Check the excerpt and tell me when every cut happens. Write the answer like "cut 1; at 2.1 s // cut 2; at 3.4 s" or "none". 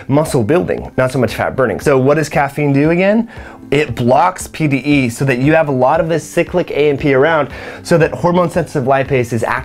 cut 1; at 1.8 s